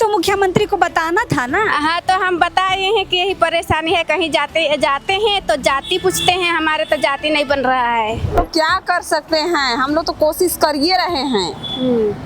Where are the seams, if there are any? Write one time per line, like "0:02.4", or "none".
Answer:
0:08.4

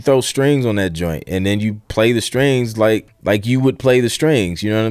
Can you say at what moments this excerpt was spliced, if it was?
0:03.1

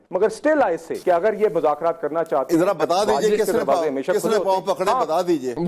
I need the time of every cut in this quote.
0:00.9

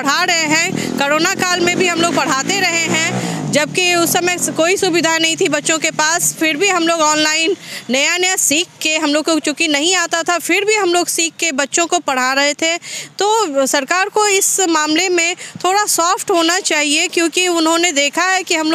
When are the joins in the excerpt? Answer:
none

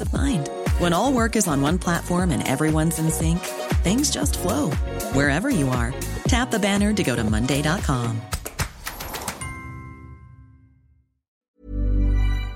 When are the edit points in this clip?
0:11.4

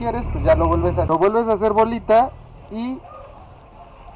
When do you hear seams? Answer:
none

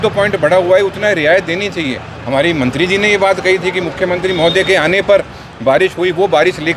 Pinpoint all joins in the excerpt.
none

